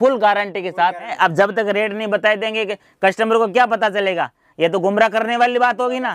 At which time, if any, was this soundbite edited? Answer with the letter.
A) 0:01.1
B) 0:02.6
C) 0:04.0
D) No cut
A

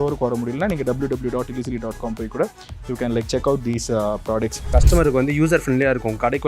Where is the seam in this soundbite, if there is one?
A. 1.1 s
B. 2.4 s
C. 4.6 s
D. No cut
C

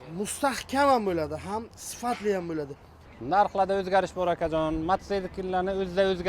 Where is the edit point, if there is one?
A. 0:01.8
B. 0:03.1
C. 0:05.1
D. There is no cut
B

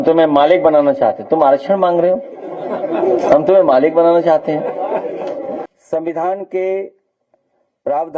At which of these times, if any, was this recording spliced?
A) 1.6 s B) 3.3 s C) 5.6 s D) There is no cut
C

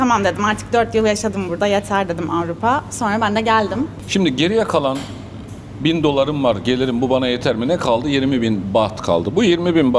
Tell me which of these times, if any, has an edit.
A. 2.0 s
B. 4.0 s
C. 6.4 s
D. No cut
B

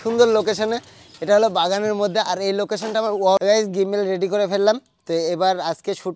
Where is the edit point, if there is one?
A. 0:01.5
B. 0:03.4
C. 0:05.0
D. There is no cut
B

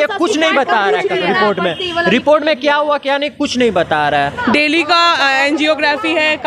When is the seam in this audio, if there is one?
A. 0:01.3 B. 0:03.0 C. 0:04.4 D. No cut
C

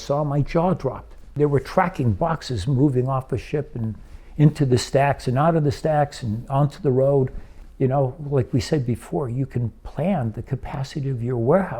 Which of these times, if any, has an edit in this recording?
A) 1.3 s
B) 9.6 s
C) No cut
A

